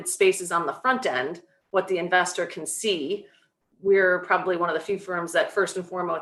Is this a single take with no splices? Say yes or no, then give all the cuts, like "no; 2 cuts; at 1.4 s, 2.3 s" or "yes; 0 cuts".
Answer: yes; 0 cuts